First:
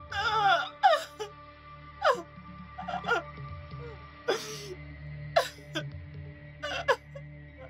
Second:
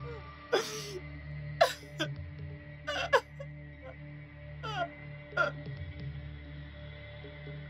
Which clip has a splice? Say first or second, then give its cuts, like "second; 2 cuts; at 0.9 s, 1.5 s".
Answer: second; 1 cut; at 5.5 s